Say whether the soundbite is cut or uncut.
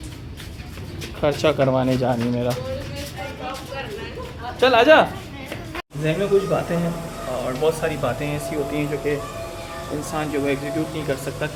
uncut